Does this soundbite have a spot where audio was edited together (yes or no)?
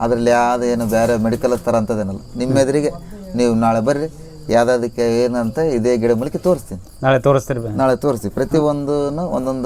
no